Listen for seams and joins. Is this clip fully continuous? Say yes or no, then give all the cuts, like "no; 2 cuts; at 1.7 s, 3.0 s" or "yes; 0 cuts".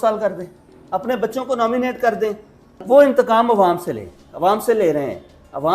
no; 1 cut; at 2.7 s